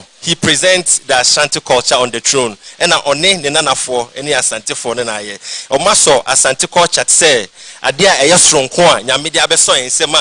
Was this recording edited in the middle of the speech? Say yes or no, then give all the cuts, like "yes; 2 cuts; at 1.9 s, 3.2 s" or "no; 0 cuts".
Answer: no; 0 cuts